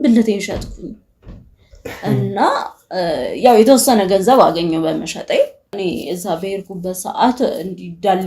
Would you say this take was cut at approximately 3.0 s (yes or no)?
no